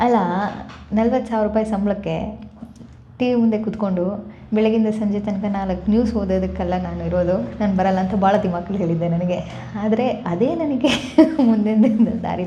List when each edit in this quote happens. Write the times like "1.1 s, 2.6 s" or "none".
none